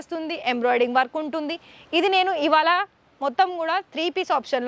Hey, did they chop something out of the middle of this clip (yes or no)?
no